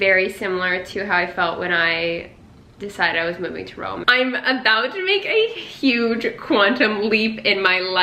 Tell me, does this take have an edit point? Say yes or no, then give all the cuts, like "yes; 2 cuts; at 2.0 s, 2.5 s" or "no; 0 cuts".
yes; 1 cut; at 4.0 s